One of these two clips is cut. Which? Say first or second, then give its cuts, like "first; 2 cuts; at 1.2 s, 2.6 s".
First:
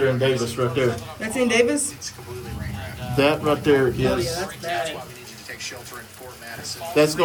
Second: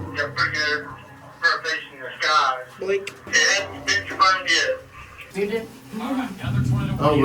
second; 2 cuts; at 3.2 s, 5.3 s